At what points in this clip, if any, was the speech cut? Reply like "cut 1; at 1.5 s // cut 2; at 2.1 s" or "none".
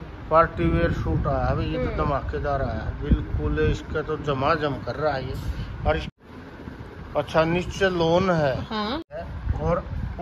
cut 1; at 6.1 s // cut 2; at 9.1 s